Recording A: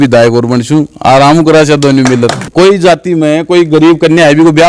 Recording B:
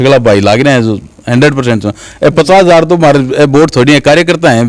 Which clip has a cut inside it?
A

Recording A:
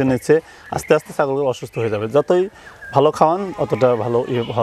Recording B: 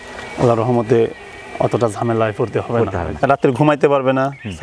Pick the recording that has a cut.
B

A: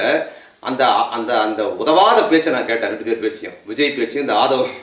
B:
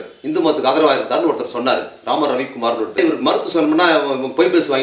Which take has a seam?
B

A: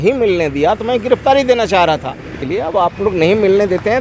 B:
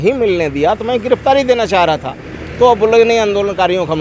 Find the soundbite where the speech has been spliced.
A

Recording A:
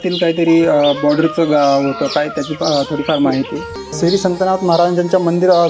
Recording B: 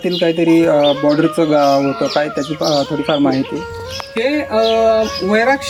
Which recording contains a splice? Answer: A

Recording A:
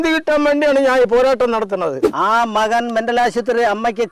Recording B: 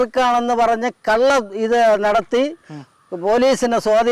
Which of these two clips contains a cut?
A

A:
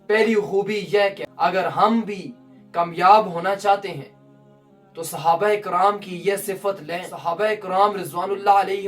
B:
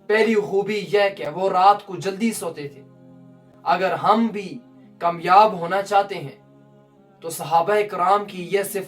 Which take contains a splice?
A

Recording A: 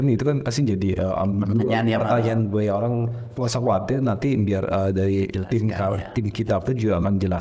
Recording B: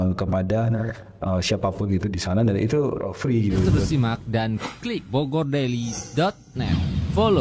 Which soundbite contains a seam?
B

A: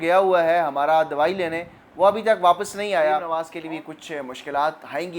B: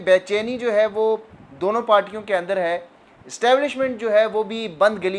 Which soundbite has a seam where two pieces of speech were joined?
A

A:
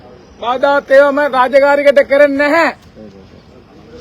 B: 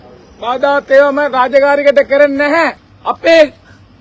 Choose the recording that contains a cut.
B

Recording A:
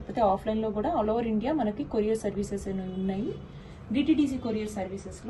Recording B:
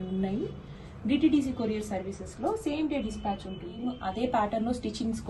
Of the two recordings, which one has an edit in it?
B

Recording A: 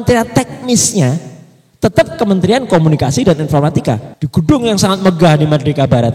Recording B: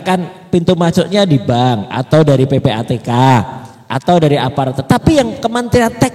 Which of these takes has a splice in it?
A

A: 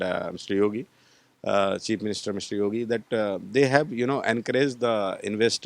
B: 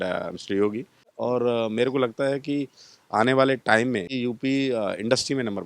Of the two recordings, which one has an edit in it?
B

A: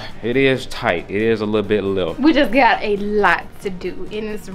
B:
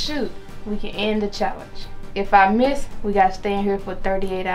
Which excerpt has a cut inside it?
A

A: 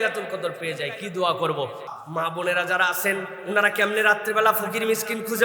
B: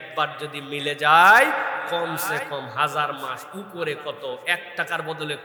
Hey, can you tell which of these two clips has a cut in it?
A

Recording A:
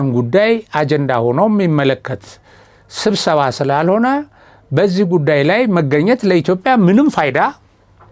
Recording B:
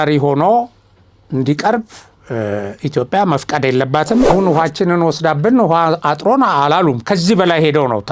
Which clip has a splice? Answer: B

